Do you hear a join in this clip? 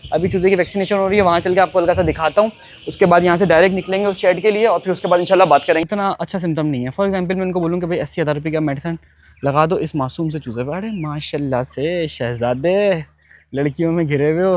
yes; 1 cut; at 5.8 s

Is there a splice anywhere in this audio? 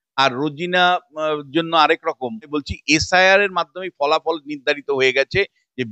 yes; 1 cut; at 2.5 s

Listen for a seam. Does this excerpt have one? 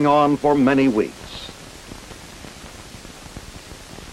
no; 0 cuts

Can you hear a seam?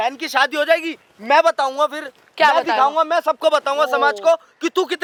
no; 0 cuts

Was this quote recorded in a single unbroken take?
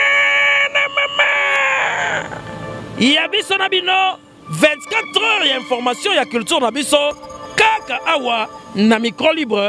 yes; 0 cuts

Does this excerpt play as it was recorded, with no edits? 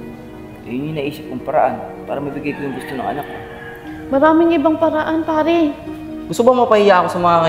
no; 1 cut; at 5.8 s

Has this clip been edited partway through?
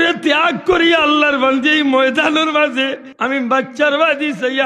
yes; 1 cut; at 3.1 s

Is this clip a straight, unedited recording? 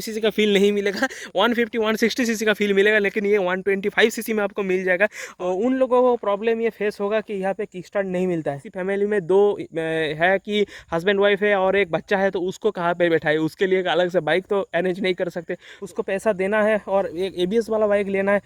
no; 3 cuts; at 5.3 s, 8.6 s, 15.7 s

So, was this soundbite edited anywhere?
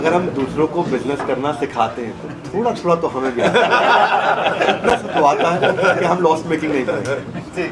no; 0 cuts

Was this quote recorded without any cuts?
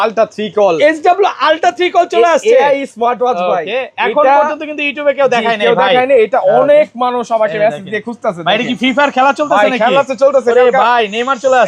yes; 0 cuts

